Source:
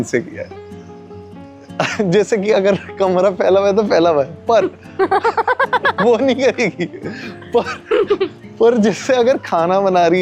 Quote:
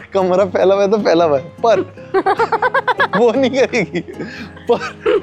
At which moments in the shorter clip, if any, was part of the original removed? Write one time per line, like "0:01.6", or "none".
none